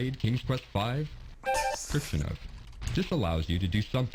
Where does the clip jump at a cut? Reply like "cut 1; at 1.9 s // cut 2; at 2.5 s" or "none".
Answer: cut 1; at 1.8 s